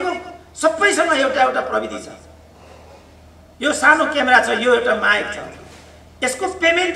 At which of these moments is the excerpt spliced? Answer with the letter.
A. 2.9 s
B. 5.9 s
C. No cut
C